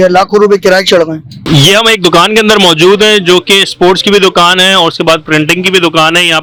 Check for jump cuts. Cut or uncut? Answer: uncut